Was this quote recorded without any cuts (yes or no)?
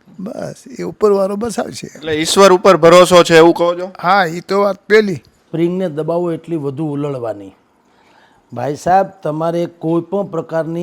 no